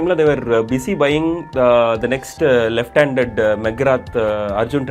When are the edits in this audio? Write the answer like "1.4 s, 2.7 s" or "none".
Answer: none